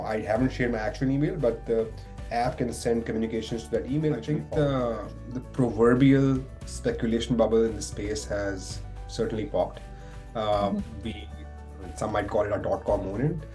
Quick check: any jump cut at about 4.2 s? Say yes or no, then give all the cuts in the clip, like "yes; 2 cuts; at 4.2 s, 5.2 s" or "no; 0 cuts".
yes; 1 cut; at 4.2 s